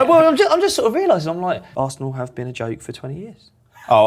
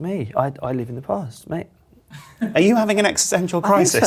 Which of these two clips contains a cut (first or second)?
first